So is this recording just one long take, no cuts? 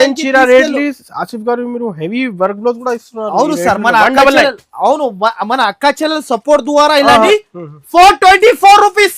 no; 1 cut; at 7.3 s

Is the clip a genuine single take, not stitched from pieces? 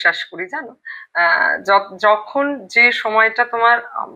yes; 0 cuts

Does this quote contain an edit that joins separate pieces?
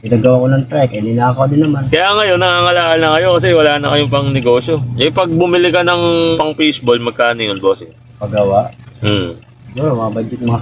no; 0 cuts

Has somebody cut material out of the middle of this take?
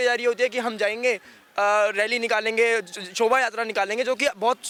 no; 0 cuts

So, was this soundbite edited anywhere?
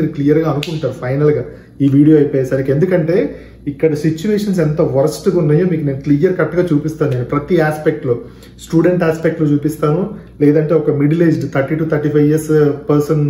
no; 0 cuts

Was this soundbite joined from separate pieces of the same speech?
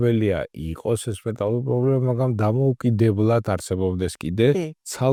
no; 0 cuts

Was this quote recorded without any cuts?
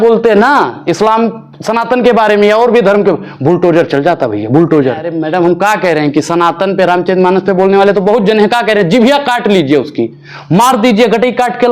no; 1 cut; at 5.1 s

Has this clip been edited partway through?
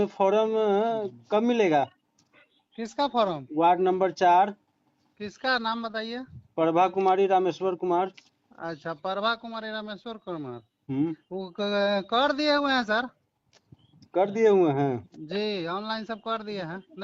no; 0 cuts

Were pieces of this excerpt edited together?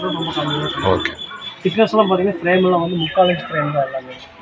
no; 0 cuts

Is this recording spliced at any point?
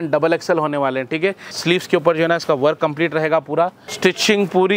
yes; 2 cuts; at 1.5 s, 3.8 s

